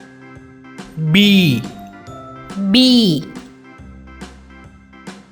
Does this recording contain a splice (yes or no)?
yes